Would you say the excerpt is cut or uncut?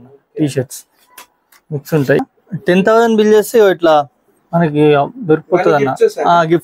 cut